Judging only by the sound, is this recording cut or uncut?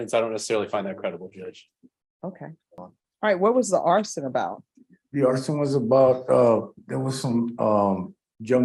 cut